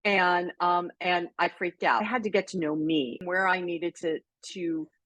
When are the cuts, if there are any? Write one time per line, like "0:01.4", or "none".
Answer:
0:02.0
0:03.2